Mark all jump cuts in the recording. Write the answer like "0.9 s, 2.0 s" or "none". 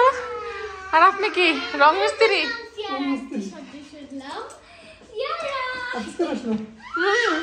none